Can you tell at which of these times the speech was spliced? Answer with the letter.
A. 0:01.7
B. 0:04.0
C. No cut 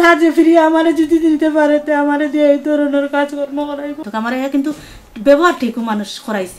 B